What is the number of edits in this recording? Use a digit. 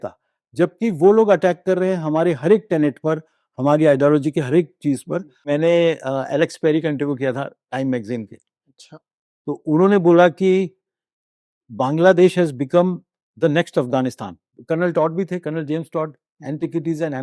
2